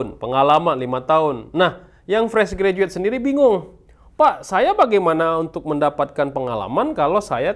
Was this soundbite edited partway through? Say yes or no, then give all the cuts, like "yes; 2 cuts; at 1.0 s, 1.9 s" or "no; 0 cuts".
no; 0 cuts